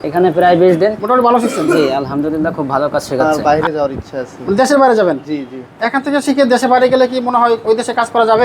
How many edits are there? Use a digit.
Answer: 2